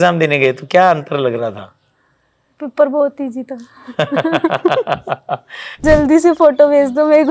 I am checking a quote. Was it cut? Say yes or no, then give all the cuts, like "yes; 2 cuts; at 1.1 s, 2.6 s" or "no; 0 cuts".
yes; 1 cut; at 5.8 s